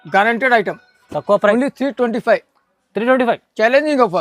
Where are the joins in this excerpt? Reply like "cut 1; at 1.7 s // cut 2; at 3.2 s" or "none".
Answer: cut 1; at 1.5 s